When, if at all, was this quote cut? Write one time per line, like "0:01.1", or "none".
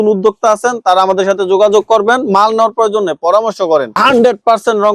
0:03.9